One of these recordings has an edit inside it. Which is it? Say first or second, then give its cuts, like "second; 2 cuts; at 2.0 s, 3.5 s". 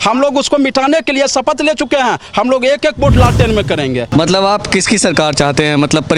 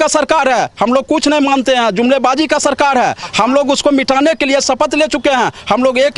first; 1 cut; at 4.1 s